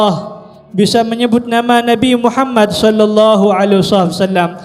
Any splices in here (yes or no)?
no